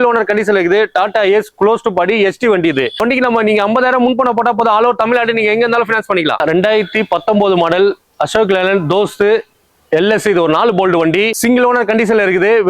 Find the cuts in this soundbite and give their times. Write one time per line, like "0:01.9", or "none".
0:03.0
0:06.4
0:11.3